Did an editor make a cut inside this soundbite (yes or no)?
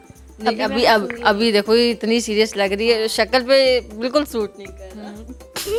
no